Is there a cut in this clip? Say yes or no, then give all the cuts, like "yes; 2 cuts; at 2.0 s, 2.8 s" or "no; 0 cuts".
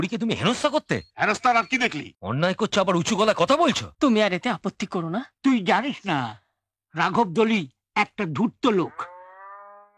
yes; 3 cuts; at 1.1 s, 2.1 s, 3.9 s